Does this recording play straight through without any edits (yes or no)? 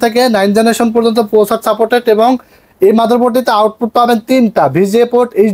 yes